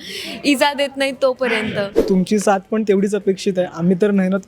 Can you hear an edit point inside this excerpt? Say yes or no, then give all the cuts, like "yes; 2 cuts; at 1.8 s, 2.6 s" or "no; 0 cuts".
yes; 1 cut; at 2.0 s